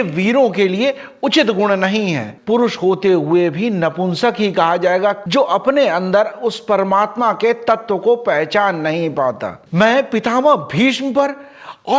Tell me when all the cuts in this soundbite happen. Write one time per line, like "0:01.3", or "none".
0:02.3
0:05.2
0:09.5